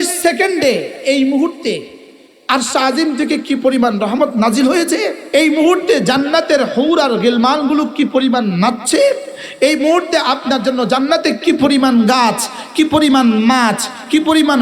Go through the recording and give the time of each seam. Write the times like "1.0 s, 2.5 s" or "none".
1.0 s, 5.2 s

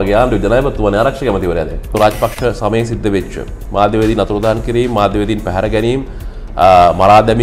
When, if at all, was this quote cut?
1.9 s

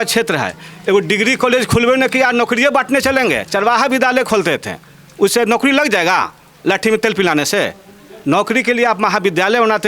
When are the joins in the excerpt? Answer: none

